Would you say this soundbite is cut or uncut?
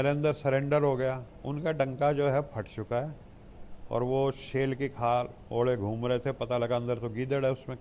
cut